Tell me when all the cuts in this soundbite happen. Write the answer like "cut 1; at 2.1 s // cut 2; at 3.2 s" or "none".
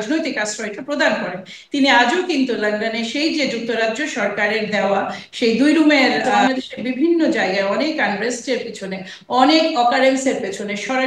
cut 1; at 6.4 s